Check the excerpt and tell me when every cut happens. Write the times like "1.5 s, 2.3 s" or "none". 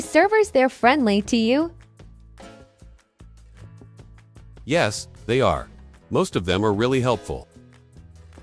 1.8 s, 4.6 s, 7.5 s